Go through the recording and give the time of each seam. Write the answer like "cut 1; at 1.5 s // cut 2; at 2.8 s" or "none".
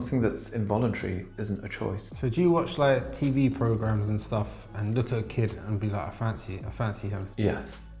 none